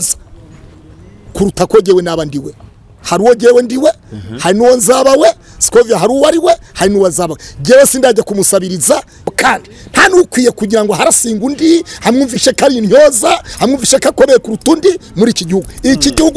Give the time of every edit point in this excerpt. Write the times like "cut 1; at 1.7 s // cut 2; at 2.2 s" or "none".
cut 1; at 9.3 s